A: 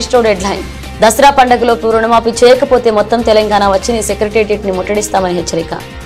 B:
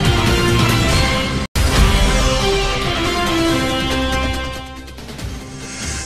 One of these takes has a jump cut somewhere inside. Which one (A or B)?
B